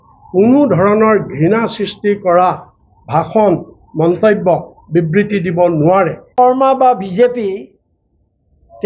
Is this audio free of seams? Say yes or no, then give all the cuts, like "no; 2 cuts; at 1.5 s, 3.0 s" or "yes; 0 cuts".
no; 1 cut; at 6.2 s